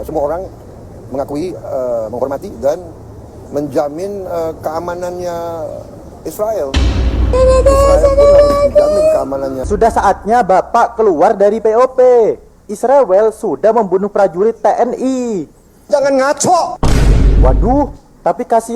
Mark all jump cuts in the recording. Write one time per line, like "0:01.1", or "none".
0:09.5